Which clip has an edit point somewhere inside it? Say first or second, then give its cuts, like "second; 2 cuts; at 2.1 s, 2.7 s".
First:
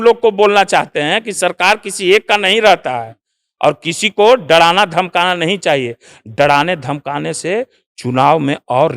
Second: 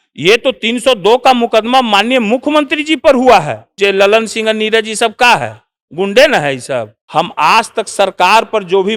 second; 2 cuts; at 3.7 s, 7.0 s